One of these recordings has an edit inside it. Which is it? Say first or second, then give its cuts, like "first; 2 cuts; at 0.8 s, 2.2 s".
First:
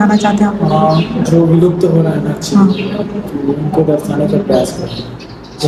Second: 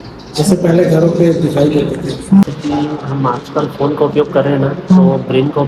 second; 1 cut; at 2.4 s